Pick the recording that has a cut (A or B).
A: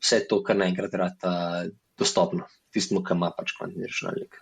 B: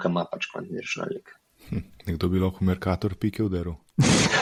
A